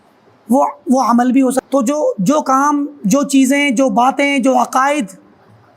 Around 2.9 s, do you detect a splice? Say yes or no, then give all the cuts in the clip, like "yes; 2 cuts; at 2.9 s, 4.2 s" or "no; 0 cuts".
no; 1 cut; at 1.7 s